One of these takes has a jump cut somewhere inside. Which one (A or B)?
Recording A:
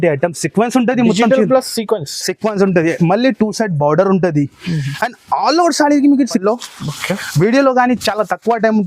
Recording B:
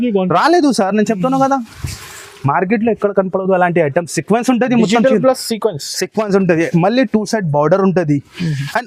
A